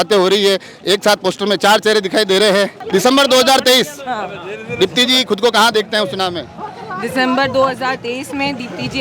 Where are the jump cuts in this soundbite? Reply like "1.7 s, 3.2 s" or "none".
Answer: none